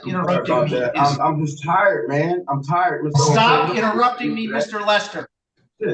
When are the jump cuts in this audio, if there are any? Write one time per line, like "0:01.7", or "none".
none